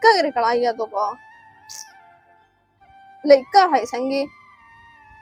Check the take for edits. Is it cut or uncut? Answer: uncut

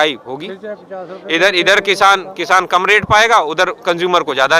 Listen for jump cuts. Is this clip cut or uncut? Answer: uncut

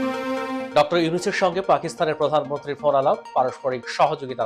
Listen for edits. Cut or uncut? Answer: uncut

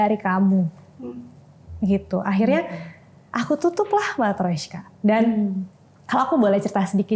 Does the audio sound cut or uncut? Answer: uncut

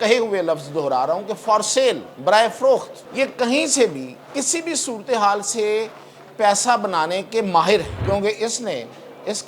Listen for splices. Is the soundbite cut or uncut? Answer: cut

